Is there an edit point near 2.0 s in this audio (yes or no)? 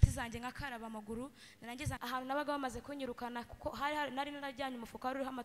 yes